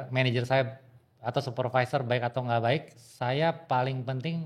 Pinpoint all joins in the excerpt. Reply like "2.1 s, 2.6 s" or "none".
none